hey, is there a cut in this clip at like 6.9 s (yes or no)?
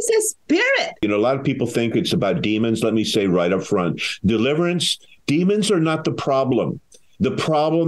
no